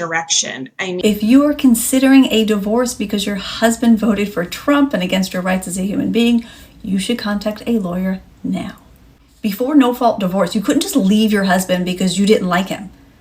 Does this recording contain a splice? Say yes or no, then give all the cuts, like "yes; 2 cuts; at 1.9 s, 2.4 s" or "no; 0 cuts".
yes; 1 cut; at 0.9 s